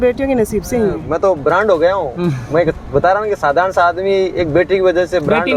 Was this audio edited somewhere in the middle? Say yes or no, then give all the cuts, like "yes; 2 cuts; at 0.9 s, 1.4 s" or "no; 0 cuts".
yes; 1 cut; at 1.0 s